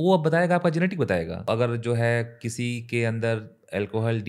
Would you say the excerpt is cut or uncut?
cut